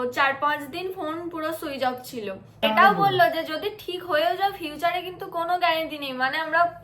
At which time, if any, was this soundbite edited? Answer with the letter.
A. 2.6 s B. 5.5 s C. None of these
A